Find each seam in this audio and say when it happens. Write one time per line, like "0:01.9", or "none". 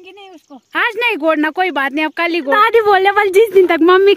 0:02.6